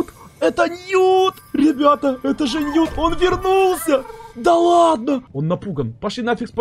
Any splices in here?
yes; 1 cut; at 5.3 s

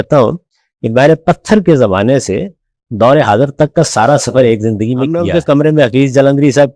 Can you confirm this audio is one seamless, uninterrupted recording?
no; 1 cut; at 5.2 s

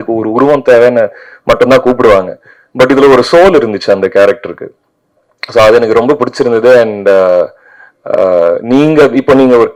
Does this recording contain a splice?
no; 0 cuts

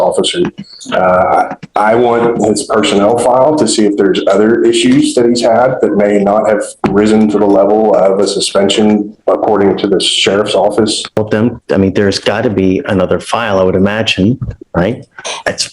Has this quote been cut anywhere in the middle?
yes; 1 cut; at 11.0 s

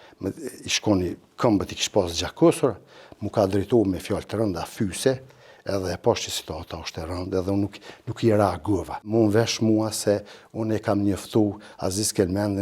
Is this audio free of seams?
no; 1 cut; at 9.1 s

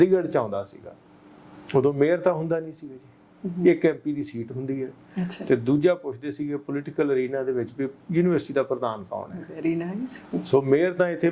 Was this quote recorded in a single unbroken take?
yes; 0 cuts

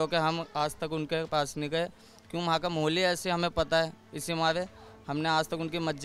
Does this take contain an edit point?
no; 0 cuts

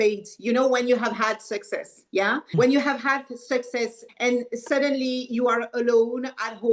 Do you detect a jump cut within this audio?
yes; 2 cuts; at 2.5 s, 4.0 s

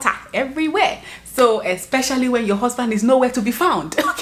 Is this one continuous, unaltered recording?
yes; 0 cuts

